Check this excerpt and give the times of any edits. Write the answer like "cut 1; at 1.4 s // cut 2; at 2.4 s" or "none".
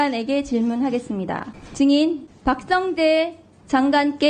cut 1; at 1.6 s // cut 2; at 2.3 s